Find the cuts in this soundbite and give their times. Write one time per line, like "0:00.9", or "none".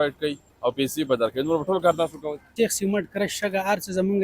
0:02.5